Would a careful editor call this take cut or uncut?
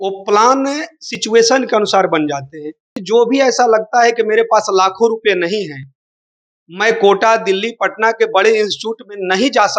cut